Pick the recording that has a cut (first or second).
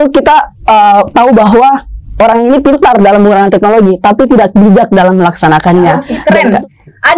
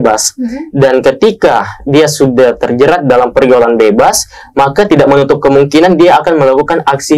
first